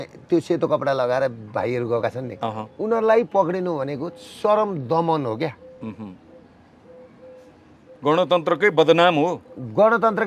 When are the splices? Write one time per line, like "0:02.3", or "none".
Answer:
none